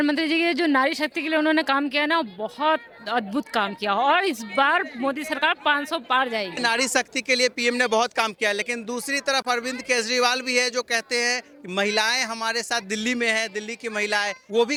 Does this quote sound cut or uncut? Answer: uncut